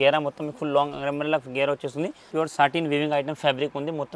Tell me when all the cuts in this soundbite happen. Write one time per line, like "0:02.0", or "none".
0:02.2